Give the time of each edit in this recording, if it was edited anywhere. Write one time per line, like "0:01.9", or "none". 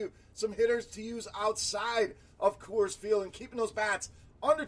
none